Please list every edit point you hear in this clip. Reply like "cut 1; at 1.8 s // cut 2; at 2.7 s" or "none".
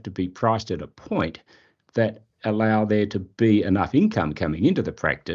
none